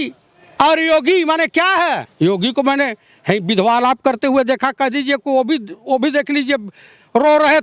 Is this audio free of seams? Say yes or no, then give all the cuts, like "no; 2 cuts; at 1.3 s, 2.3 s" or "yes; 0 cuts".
no; 1 cut; at 2.1 s